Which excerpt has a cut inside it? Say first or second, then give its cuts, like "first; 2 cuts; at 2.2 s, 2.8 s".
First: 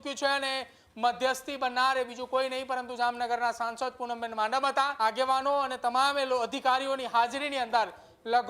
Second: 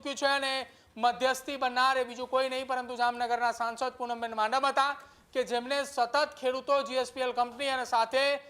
first; 1 cut; at 4.9 s